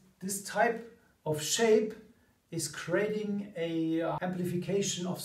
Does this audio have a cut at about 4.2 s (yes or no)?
yes